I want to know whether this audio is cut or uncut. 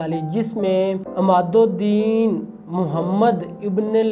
cut